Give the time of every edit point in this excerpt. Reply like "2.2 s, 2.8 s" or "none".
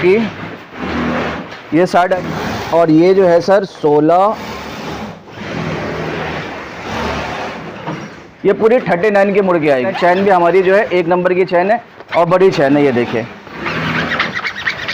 2.2 s, 9.9 s